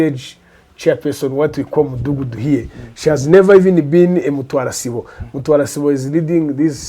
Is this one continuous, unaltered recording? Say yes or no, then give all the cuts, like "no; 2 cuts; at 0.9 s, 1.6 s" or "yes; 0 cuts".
yes; 0 cuts